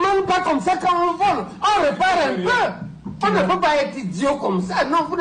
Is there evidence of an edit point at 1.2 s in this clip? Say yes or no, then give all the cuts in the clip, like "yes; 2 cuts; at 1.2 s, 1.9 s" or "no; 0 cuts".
no; 1 cut; at 3.2 s